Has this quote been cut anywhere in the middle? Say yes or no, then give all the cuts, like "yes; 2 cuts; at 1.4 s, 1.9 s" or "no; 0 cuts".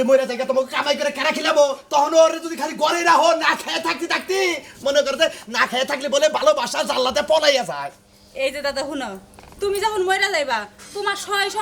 no; 0 cuts